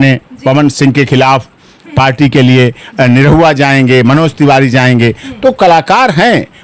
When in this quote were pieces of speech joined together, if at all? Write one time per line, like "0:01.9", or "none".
none